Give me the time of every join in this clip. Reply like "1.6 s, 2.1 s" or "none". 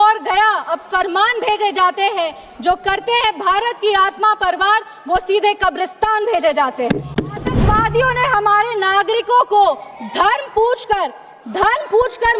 7.6 s

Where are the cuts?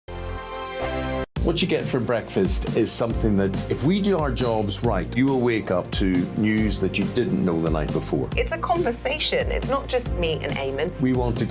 1.1 s

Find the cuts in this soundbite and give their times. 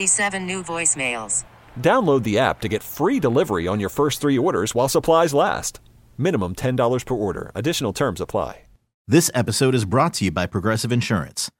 8.9 s

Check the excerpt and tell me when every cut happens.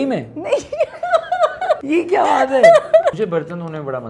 1.8 s, 3.2 s

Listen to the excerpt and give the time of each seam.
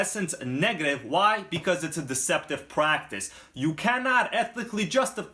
none

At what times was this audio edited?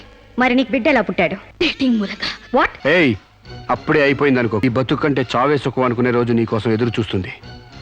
1.4 s, 2.7 s, 4.6 s

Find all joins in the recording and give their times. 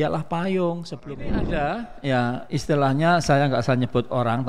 1.4 s

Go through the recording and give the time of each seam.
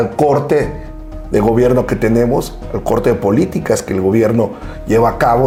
none

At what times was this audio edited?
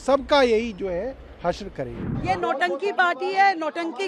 2.1 s

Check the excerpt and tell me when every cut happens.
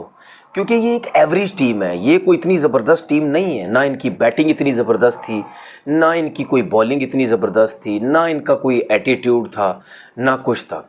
none

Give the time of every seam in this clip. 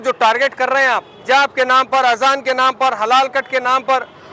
1.1 s

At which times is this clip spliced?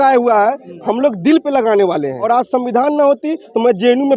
2.2 s

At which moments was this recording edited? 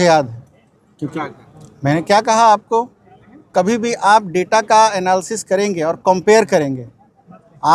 1.2 s

